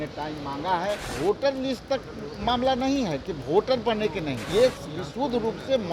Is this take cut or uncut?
cut